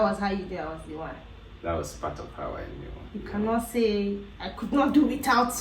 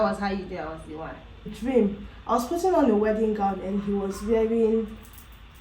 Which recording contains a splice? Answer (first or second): second